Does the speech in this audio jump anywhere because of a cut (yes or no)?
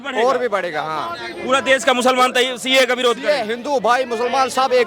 no